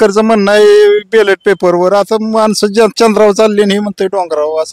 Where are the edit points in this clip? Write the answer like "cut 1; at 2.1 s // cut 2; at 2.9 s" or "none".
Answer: none